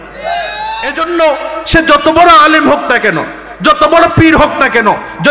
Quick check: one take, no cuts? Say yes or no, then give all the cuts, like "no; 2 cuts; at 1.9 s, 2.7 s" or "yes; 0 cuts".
no; 1 cut; at 0.9 s